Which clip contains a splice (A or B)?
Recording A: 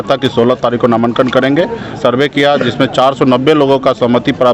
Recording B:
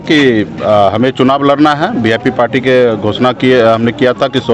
A